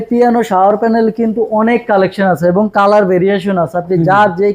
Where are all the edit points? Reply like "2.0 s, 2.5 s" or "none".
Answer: none